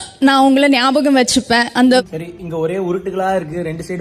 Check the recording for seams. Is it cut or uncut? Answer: uncut